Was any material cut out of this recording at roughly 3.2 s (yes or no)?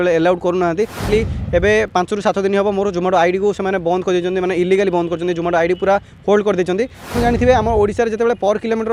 no